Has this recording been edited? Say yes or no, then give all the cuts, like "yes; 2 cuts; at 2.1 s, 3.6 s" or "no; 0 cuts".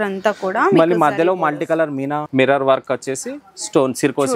yes; 1 cut; at 2.2 s